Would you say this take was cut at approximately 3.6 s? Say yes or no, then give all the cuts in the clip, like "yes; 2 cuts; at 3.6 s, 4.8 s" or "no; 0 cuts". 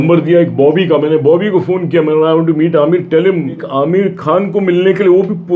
yes; 1 cut; at 3.6 s